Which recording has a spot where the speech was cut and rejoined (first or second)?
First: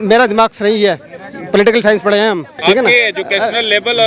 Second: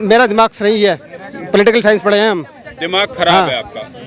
first